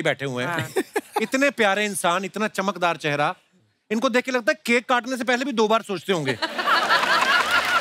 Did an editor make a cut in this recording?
no; 0 cuts

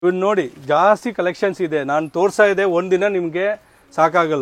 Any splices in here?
no; 0 cuts

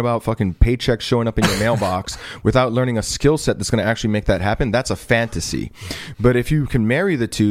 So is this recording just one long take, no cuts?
yes; 0 cuts

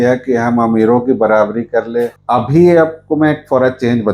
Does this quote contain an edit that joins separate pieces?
yes; 1 cut; at 2.2 s

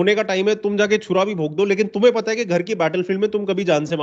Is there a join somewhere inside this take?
no; 0 cuts

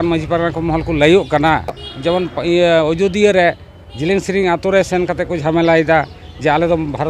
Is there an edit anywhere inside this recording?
yes; 1 cut; at 1.9 s

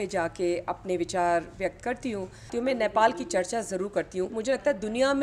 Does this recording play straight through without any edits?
no; 2 cuts; at 2.5 s, 4.3 s

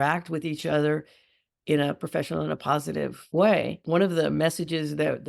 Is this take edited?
yes; 2 cuts; at 3.2 s, 3.8 s

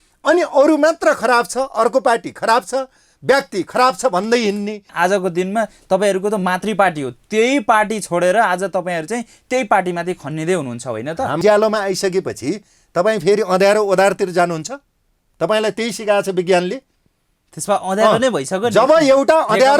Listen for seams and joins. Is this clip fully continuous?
no; 2 cuts; at 4.9 s, 11.4 s

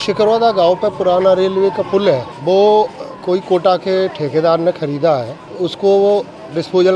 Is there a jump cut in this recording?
yes; 2 cuts; at 2.3 s, 5.4 s

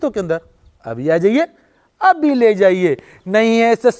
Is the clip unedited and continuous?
yes; 0 cuts

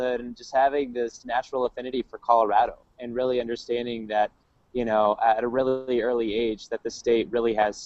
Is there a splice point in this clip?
yes; 1 cut; at 5.0 s

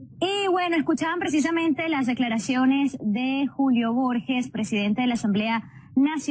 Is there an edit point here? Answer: yes; 1 cut; at 4.7 s

